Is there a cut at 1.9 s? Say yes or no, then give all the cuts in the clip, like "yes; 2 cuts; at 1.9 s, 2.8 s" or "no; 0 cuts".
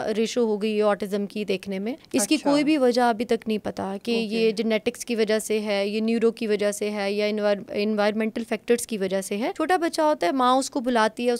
yes; 2 cuts; at 1.9 s, 9.5 s